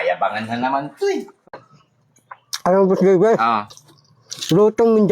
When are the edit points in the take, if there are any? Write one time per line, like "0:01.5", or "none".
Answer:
0:01.3